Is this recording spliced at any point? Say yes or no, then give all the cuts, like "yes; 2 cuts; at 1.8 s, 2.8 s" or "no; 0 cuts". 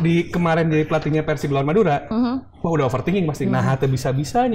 no; 0 cuts